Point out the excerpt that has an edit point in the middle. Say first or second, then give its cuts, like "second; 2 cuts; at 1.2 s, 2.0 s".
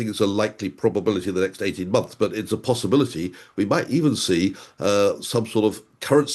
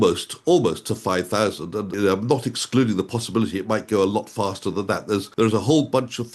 second; 2 cuts; at 1.9 s, 5.3 s